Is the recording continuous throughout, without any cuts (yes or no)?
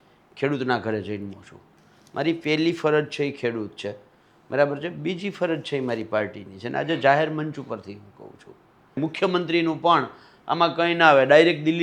no